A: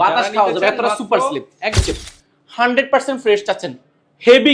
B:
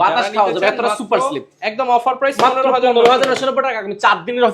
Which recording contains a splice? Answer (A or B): A